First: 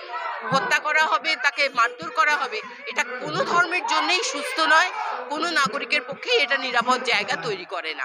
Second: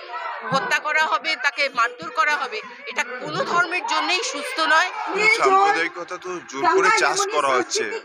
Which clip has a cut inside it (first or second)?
second